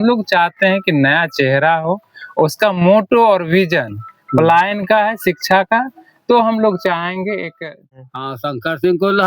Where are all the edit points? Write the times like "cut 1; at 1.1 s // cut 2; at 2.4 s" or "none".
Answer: cut 1; at 7.9 s